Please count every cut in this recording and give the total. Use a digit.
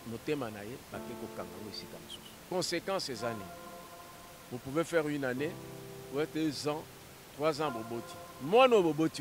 1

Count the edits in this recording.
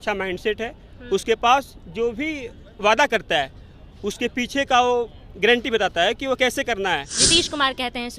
1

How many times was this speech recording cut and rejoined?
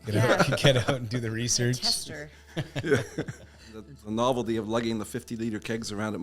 1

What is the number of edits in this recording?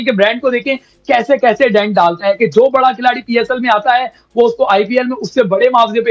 0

